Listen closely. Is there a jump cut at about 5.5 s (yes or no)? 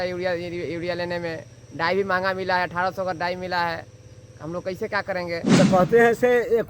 yes